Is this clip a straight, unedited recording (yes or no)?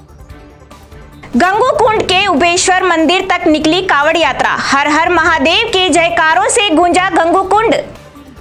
yes